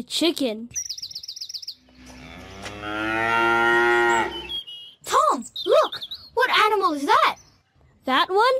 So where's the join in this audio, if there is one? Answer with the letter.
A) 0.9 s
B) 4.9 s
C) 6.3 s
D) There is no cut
A